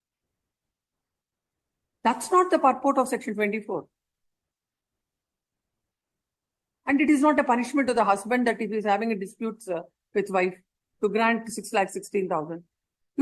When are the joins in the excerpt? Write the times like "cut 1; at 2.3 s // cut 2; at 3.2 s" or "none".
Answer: none

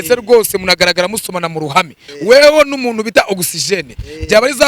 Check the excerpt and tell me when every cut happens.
cut 1; at 2.0 s

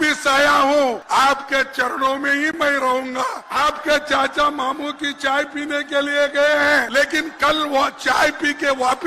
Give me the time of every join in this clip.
cut 1; at 1.0 s // cut 2; at 3.4 s // cut 3; at 6.9 s

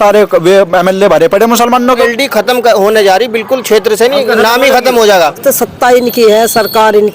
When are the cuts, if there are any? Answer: cut 1; at 2.0 s // cut 2; at 5.4 s

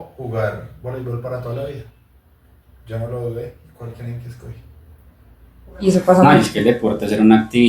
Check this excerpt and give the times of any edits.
cut 1; at 5.7 s

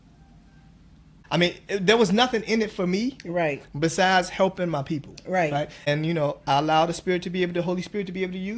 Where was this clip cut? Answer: cut 1; at 1.1 s // cut 2; at 5.9 s

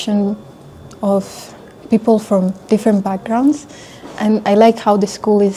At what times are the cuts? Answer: none

